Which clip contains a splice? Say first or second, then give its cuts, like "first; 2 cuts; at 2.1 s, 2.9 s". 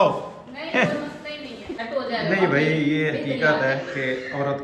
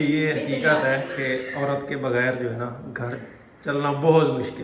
first; 1 cut; at 1.8 s